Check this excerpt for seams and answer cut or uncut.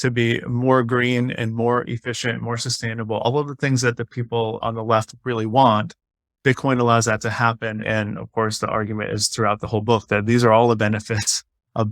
cut